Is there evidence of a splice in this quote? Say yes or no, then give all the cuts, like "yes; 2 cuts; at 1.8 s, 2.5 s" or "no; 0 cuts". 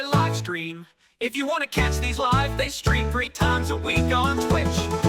no; 0 cuts